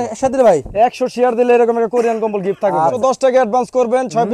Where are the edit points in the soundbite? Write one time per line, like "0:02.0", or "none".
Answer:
0:03.0